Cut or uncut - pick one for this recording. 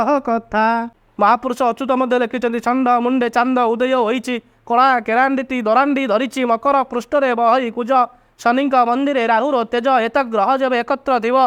cut